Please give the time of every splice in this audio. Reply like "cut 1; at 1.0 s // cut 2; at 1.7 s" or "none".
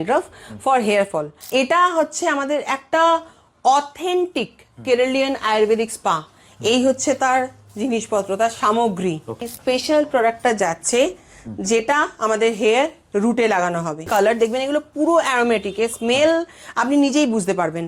cut 1; at 1.4 s // cut 2; at 9.5 s // cut 3; at 14.0 s